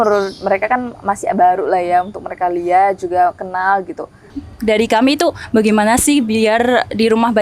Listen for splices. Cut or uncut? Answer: cut